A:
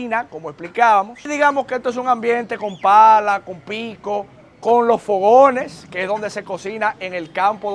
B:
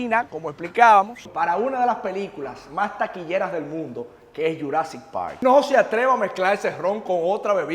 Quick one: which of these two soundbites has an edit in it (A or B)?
B